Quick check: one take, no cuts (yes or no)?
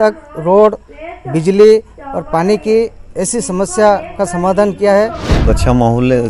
no